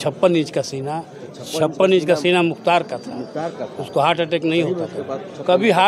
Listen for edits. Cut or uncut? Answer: uncut